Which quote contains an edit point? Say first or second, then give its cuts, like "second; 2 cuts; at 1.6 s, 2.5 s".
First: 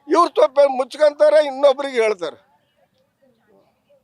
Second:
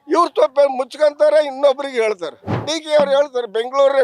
second; 1 cut; at 2.7 s